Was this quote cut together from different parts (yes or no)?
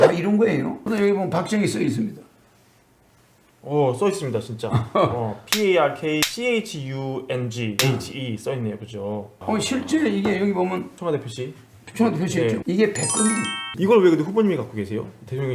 yes